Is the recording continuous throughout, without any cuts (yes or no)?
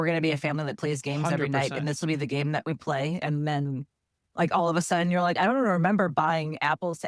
yes